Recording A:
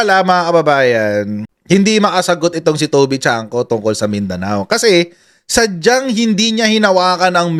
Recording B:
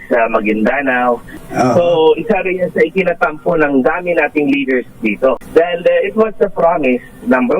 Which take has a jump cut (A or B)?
B